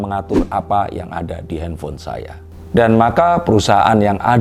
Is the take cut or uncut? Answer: uncut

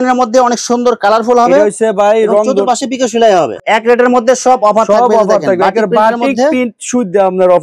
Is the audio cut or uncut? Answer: cut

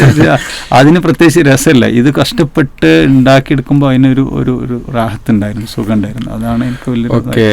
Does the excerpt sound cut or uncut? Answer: uncut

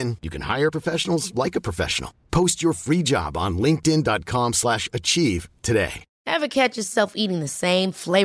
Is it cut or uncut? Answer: cut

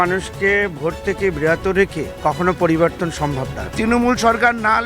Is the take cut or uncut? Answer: cut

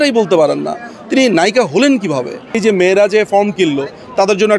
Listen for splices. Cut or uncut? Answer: cut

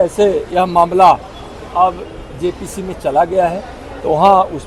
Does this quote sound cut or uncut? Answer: uncut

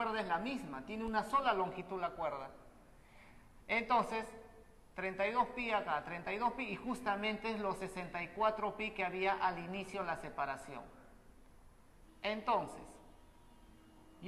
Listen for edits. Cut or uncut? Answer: cut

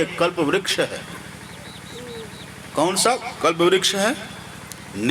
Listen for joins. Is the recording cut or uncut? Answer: uncut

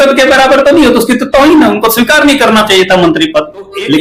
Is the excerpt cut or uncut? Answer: uncut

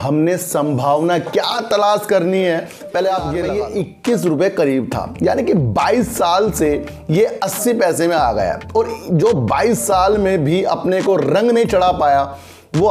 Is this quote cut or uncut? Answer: cut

